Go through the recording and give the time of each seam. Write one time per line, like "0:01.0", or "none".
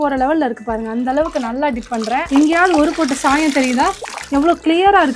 0:02.2
0:04.1